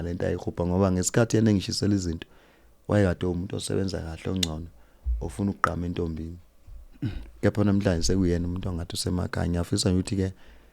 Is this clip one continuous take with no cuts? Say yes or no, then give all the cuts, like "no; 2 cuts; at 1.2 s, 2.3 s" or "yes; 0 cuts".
yes; 0 cuts